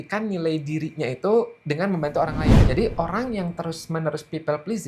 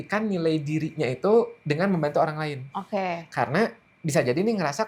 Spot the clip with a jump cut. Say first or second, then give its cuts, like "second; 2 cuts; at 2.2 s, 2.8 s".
first; 1 cut; at 2.6 s